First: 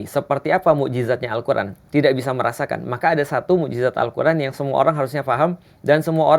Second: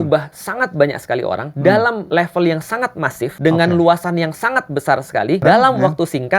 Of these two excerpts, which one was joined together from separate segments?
second; 4 cuts; at 1.5 s, 2.0 s, 3.3 s, 5.4 s

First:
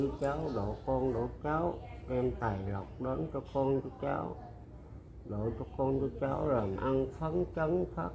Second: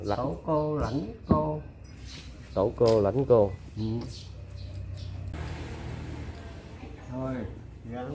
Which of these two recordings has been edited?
second; 1 cut; at 5.3 s

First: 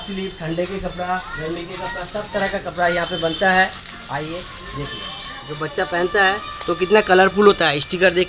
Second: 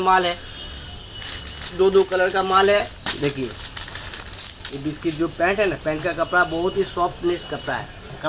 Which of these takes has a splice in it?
first; 1 cut; at 5.3 s

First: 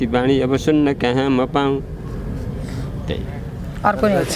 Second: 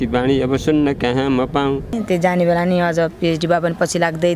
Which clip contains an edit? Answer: second; 1 cut; at 1.9 s

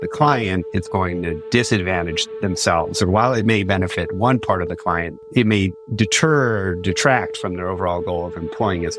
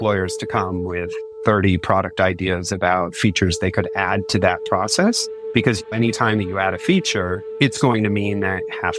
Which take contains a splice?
second; 3 cuts; at 1.2 s, 5.8 s, 7.4 s

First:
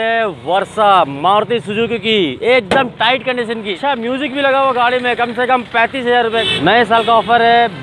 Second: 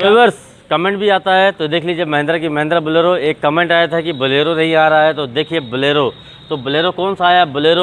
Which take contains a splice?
first; 2 cuts; at 3.7 s, 6.4 s

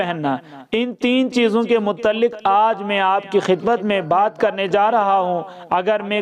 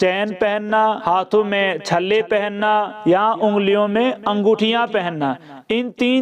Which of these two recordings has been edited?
second; 2 cuts; at 1.0 s, 2.9 s

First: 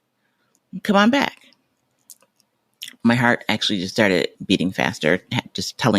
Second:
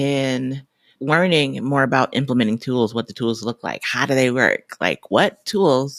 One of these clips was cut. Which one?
first; 1 cut; at 4.3 s

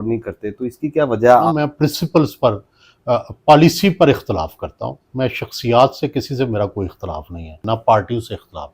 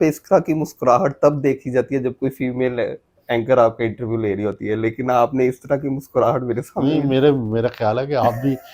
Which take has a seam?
first; 2 cuts; at 1.4 s, 7.5 s

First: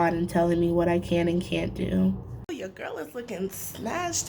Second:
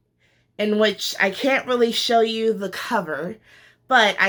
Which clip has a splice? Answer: first; 1 cut; at 2.3 s

